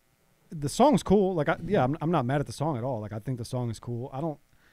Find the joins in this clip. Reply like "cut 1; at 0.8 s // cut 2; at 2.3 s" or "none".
none